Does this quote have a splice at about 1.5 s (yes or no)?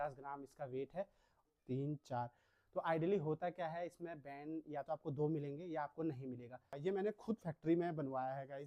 yes